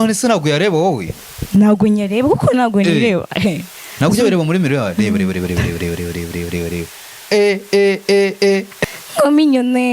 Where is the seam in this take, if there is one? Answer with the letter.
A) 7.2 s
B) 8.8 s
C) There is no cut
B